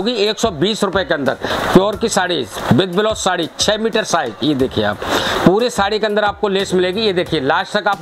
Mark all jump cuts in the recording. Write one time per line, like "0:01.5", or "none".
0:01.5
0:05.3